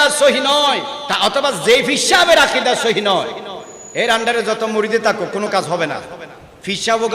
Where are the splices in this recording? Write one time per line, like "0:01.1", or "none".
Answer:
0:01.0